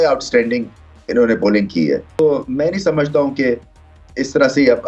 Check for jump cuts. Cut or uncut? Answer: uncut